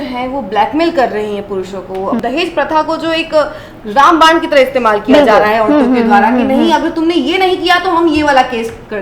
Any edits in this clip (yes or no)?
yes